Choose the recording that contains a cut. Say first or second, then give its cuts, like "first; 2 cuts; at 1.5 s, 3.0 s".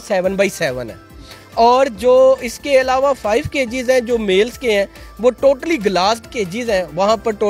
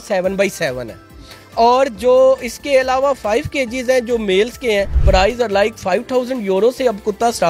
second; 1 cut; at 5.0 s